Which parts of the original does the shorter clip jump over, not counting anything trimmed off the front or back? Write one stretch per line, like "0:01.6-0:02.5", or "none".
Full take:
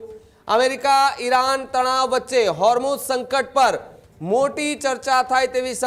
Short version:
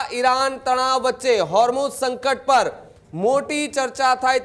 none